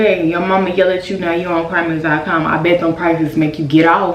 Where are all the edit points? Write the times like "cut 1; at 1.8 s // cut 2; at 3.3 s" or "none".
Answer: none